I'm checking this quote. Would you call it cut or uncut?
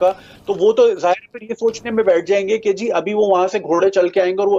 uncut